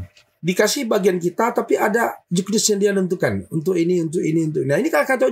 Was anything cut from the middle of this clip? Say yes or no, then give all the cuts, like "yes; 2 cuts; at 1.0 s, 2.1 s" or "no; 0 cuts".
no; 0 cuts